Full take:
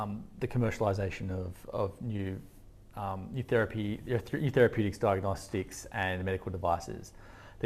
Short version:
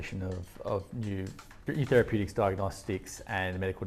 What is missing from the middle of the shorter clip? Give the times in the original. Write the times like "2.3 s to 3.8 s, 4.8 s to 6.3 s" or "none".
2.7 s to 4.3 s